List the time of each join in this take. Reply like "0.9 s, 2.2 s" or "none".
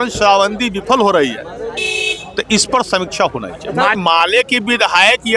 4.0 s